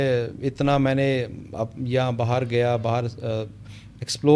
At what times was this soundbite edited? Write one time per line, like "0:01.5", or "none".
none